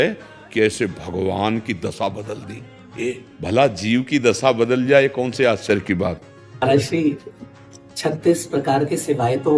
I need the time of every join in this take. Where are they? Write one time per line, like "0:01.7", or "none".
0:03.3
0:06.6

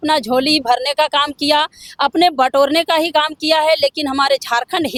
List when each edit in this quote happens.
none

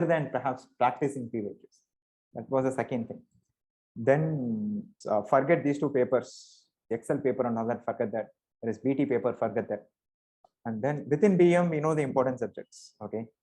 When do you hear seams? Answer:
0:04.9
0:06.8

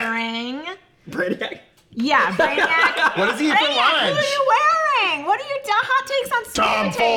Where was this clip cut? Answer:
none

